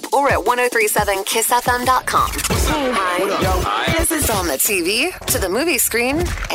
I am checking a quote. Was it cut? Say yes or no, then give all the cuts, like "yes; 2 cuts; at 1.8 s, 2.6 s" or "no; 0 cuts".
yes; 1 cut; at 2.4 s